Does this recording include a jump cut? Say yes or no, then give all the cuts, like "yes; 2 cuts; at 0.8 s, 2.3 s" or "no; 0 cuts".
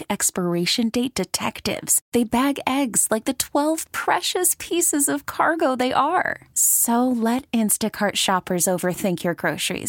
no; 0 cuts